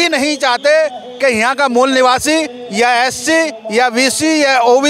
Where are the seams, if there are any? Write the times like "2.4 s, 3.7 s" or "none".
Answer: none